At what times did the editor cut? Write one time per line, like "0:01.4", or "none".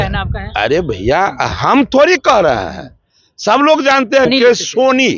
0:04.3